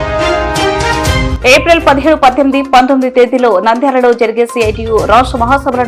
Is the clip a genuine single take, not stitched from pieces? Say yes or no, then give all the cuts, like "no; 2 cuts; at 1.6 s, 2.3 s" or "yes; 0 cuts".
no; 1 cut; at 1.3 s